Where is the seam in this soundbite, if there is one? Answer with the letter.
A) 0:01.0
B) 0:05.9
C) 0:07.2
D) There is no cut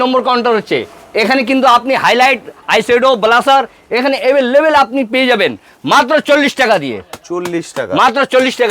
D